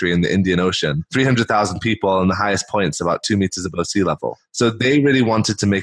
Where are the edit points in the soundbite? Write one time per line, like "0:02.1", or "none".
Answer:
0:01.0